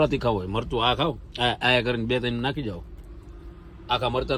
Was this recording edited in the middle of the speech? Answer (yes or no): no